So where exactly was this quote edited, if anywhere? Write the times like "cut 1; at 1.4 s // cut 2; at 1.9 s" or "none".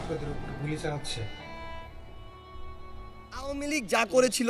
cut 1; at 3.6 s